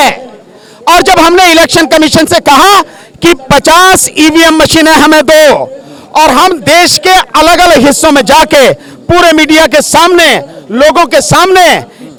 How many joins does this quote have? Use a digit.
0